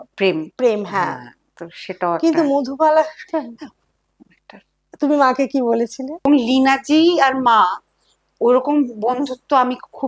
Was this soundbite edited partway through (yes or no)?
yes